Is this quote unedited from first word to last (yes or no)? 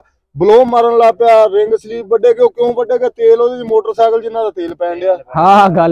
yes